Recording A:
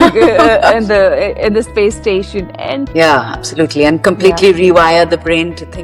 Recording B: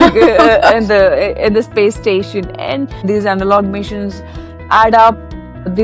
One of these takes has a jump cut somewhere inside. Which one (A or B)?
A